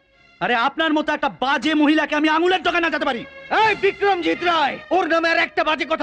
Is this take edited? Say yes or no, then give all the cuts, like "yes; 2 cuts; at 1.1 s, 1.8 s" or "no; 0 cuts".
no; 0 cuts